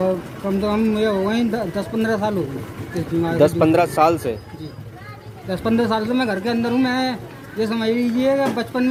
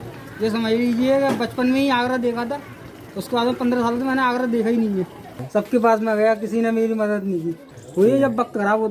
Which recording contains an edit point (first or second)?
second